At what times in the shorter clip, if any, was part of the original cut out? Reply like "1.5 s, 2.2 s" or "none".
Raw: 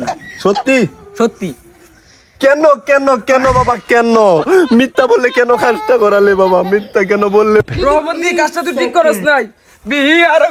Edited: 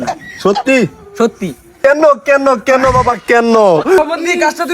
1.7 s, 4.0 s